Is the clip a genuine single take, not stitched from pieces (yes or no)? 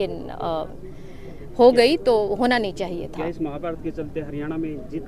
yes